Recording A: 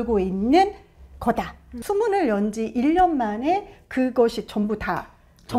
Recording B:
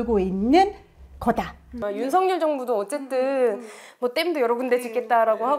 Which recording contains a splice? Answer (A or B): A